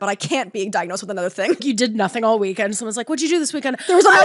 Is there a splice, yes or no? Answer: yes